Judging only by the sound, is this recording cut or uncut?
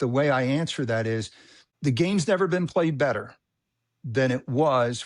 cut